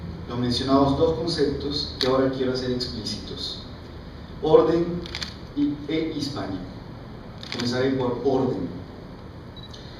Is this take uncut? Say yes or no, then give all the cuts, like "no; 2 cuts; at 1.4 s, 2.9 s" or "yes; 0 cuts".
no; 1 cut; at 5.7 s